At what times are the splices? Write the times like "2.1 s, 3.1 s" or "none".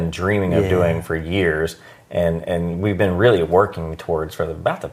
none